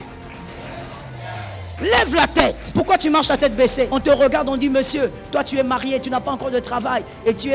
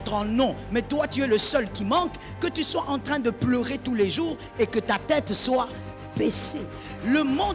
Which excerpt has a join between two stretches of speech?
first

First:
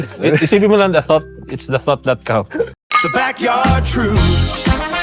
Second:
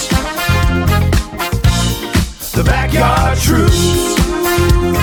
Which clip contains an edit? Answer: first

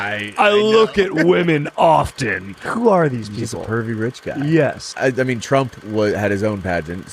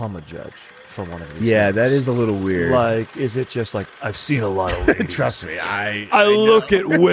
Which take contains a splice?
first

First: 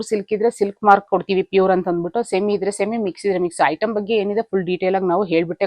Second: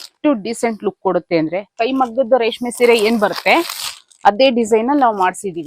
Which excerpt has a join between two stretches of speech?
second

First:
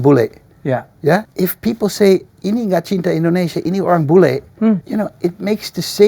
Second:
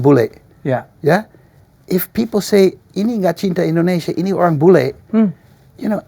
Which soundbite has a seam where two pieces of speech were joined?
first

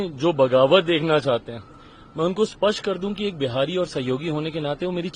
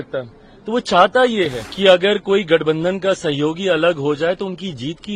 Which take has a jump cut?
second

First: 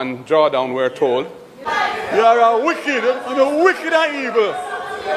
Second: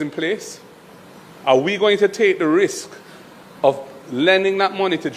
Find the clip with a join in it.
first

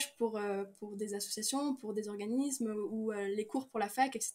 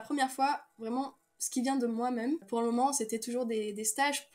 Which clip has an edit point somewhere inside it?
second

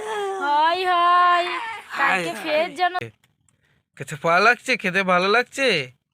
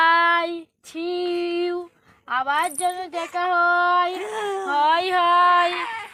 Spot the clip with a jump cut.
first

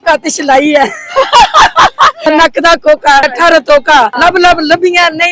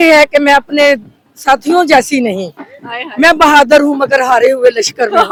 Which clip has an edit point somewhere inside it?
first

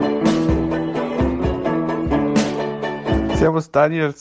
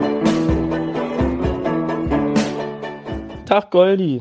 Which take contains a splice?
first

